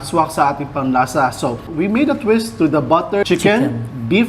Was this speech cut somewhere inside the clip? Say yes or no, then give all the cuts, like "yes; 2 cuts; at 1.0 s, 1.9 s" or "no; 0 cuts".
yes; 2 cuts; at 1.7 s, 3.2 s